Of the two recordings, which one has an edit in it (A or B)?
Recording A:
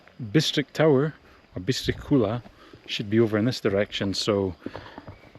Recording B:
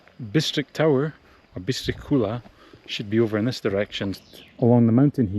B